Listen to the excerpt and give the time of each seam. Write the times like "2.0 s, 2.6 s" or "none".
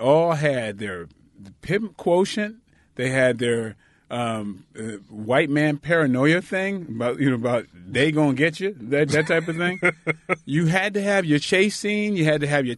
none